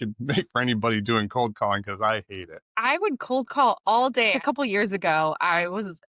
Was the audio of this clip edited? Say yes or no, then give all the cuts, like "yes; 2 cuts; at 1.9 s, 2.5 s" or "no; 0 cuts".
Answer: yes; 2 cuts; at 2.7 s, 4.4 s